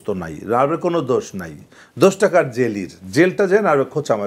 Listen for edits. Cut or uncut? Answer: uncut